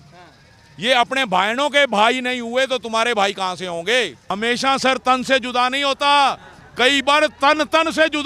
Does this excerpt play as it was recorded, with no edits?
no; 1 cut; at 4.2 s

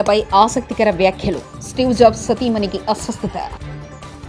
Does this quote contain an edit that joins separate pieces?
no; 0 cuts

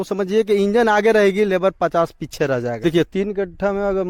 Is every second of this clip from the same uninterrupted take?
no; 1 cut; at 2.7 s

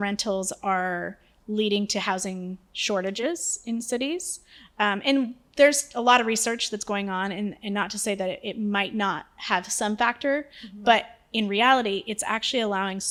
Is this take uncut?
yes; 0 cuts

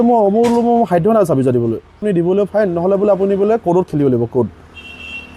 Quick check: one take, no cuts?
no; 1 cut; at 2.0 s

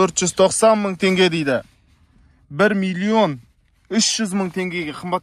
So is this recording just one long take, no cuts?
yes; 0 cuts

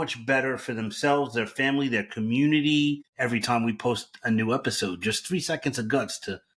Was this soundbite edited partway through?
yes; 1 cut; at 3.1 s

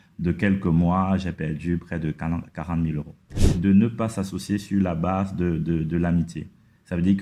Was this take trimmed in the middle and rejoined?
yes; 1 cut; at 3.5 s

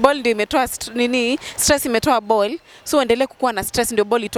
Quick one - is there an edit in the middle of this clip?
no; 0 cuts

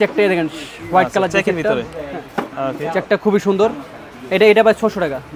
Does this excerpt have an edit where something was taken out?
no; 0 cuts

